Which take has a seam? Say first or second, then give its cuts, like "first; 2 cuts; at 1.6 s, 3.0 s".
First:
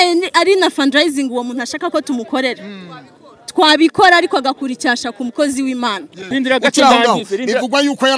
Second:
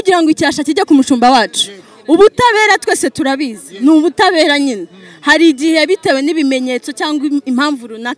first; 1 cut; at 6.3 s